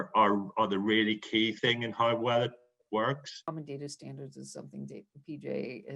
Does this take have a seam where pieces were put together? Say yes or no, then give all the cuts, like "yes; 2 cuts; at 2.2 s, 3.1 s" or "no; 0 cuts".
yes; 1 cut; at 3.4 s